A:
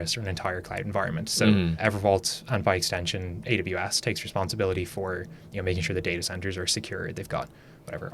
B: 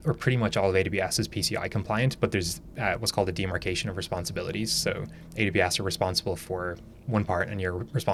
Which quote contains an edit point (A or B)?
A